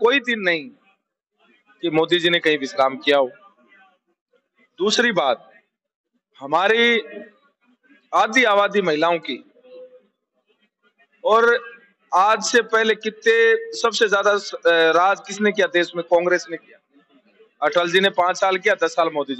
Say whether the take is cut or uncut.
uncut